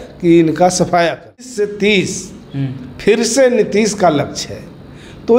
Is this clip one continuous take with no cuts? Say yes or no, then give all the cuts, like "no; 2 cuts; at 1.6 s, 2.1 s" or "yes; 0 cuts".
no; 1 cut; at 1.6 s